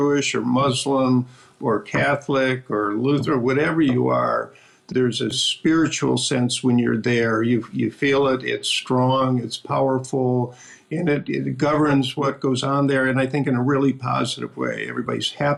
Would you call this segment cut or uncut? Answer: uncut